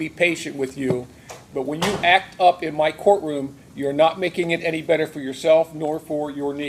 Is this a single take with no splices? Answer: yes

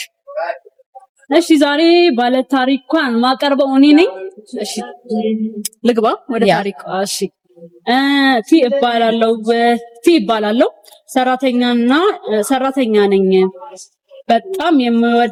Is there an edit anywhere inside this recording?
no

